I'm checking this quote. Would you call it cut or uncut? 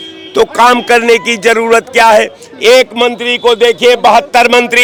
uncut